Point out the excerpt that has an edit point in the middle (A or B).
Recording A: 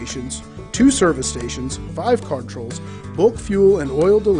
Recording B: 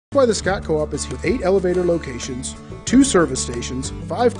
B